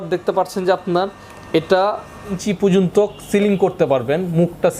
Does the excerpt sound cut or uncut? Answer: cut